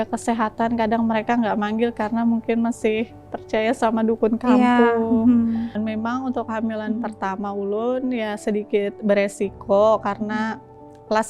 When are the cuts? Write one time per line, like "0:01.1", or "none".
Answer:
0:05.7